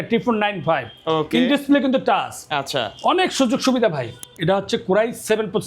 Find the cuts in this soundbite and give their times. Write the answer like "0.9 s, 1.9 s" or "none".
4.2 s